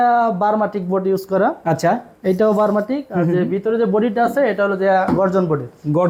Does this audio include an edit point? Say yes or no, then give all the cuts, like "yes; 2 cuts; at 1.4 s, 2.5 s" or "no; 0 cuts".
no; 0 cuts